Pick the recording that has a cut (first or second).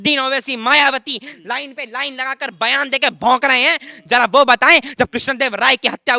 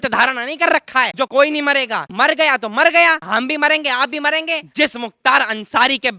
second